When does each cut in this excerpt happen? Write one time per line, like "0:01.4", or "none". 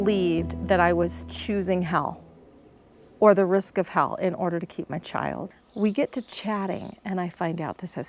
0:05.5